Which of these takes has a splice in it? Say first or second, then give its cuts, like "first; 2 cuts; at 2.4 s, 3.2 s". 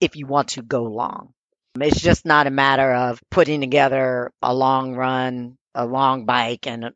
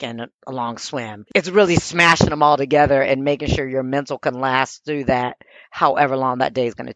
first; 3 cuts; at 3.2 s, 4.4 s, 5.7 s